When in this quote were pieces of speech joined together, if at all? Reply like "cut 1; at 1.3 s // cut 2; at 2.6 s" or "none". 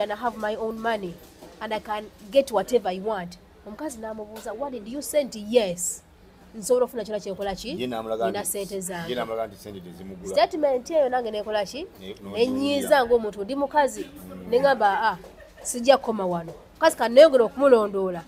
none